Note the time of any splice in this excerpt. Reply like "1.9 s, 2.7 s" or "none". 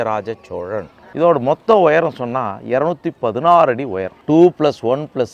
1.0 s, 4.1 s